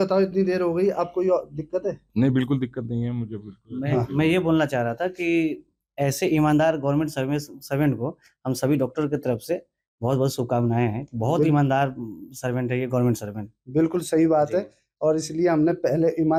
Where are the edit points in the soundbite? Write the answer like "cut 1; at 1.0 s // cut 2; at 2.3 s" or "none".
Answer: none